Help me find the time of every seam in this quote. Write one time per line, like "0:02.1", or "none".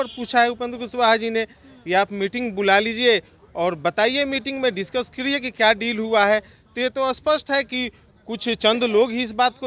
none